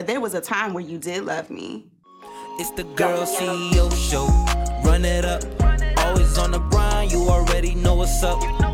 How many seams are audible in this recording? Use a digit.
1